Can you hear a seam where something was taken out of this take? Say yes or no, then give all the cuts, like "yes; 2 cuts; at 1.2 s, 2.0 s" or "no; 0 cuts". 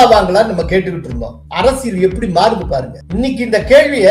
no; 0 cuts